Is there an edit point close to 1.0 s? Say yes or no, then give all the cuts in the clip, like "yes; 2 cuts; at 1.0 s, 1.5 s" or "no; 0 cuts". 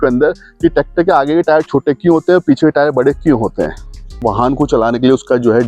no; 1 cut; at 4.2 s